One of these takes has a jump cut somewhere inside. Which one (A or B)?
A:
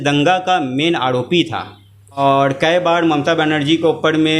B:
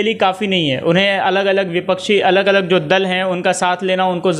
A